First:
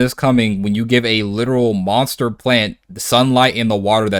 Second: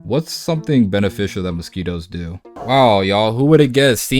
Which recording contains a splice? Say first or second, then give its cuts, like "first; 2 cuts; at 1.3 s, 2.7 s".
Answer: second; 1 cut; at 2.6 s